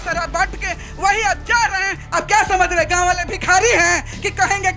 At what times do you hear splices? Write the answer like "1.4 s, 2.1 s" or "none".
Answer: 2.0 s